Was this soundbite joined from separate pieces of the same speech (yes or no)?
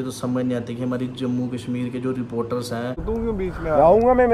yes